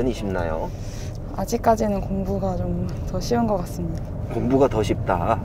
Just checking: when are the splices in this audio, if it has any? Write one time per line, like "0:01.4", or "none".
none

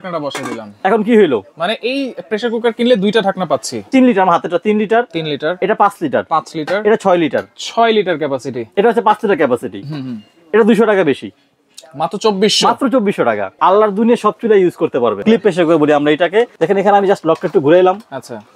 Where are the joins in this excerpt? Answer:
0:03.9
0:08.6
0:13.5
0:15.2
0:16.5

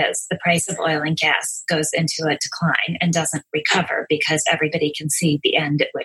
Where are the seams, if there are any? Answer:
none

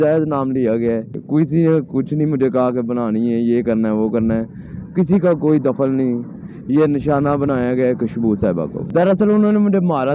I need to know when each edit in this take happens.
0:01.2
0:08.8

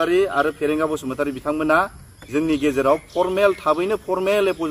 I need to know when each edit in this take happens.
none

